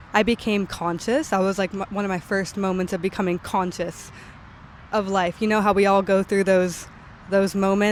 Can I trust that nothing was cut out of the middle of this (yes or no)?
yes